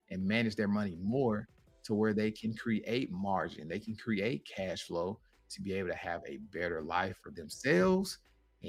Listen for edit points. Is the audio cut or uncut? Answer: uncut